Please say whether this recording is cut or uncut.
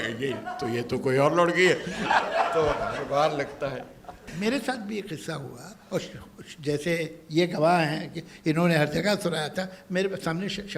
cut